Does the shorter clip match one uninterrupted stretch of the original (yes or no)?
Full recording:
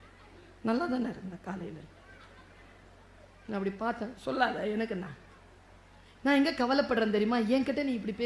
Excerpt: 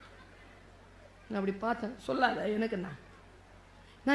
yes